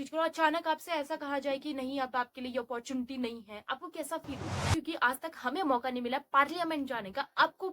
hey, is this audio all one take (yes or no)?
no